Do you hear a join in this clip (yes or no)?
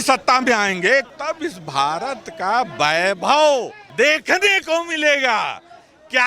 yes